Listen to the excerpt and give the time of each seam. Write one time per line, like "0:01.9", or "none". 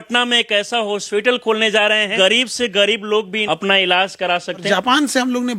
0:02.1
0:03.4
0:04.6

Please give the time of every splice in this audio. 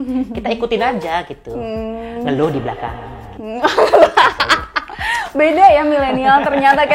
none

